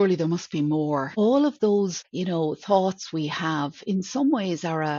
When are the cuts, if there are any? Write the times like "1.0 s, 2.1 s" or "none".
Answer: 1.1 s, 2.1 s